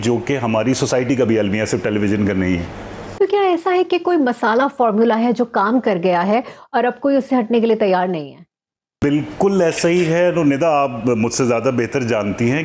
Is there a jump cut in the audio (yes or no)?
no